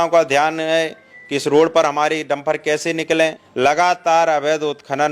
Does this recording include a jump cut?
yes; 1 cut; at 3.4 s

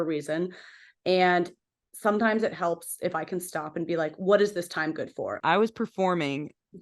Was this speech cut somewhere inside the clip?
yes; 1 cut; at 5.3 s

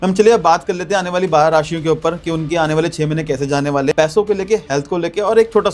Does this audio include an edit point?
yes; 1 cut; at 3.9 s

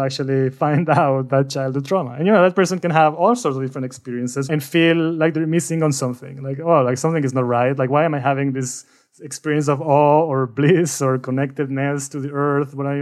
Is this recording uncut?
no; 1 cut; at 4.4 s

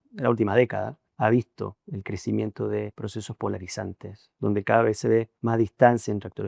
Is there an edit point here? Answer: yes; 4 cuts; at 1.0 s, 1.9 s, 3.0 s, 5.4 s

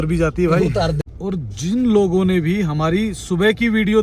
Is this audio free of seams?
no; 1 cut; at 1.1 s

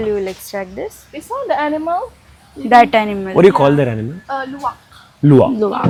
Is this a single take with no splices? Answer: yes; 0 cuts

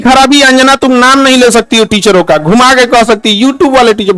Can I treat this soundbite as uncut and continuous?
yes; 0 cuts

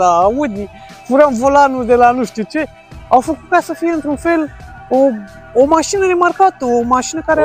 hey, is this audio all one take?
yes; 0 cuts

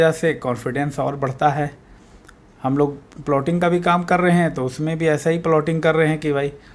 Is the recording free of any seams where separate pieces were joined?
yes; 0 cuts

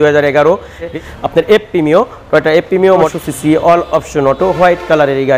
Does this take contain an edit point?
yes; 2 cuts; at 1.0 s, 3.1 s

